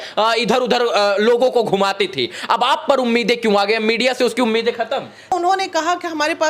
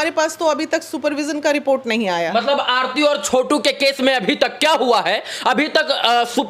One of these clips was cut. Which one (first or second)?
first